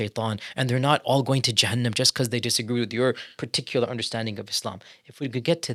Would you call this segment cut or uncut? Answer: uncut